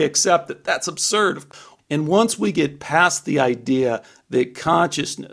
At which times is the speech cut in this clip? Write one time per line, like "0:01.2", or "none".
0:01.5